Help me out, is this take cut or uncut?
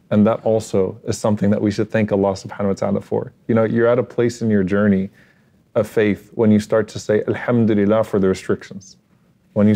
uncut